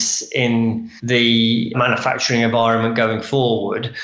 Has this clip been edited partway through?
yes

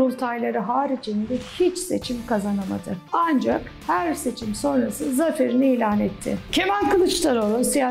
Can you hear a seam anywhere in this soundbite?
yes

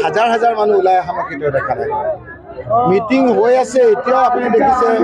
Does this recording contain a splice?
yes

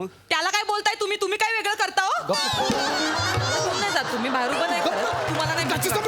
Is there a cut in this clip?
no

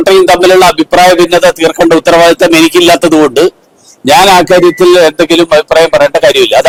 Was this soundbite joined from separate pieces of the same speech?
no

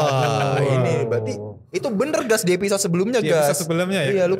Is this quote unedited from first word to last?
yes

